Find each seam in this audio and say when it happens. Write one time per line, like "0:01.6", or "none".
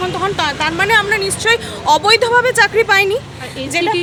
none

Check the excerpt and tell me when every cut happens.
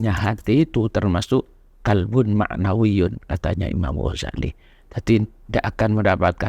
none

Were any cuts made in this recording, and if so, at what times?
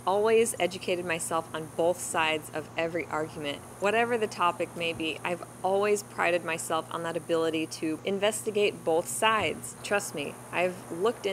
0:03.7
0:08.0
0:09.7

